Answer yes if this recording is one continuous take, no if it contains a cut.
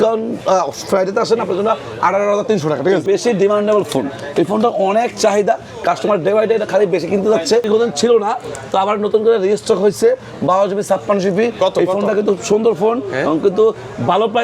no